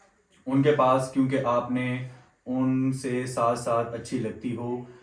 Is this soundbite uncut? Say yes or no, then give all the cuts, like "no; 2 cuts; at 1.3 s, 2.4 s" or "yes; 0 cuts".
yes; 0 cuts